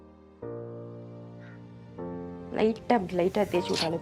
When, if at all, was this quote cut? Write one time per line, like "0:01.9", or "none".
0:02.5